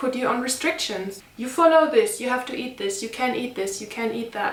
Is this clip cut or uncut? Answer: uncut